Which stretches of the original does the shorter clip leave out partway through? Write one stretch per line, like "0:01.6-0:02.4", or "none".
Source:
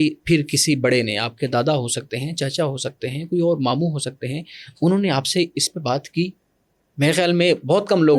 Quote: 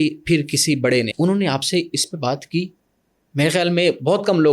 0:01.1-0:04.7